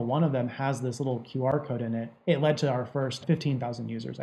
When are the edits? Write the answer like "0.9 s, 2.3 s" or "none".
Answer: 2.1 s, 3.2 s